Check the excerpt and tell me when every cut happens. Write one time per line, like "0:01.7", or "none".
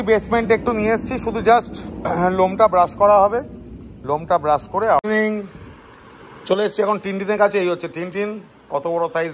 0:05.0